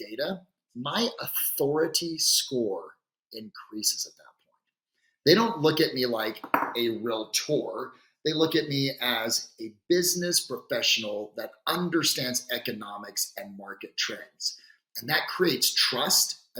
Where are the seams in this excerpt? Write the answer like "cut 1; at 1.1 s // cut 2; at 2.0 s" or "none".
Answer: none